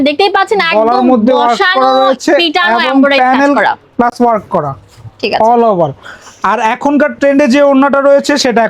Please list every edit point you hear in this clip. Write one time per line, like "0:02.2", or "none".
none